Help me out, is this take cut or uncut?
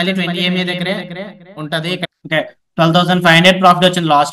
cut